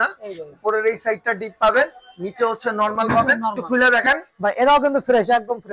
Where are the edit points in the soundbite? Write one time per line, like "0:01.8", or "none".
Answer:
0:03.6